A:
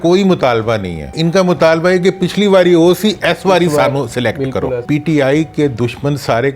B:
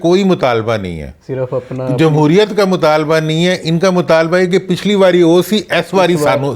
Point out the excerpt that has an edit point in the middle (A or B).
A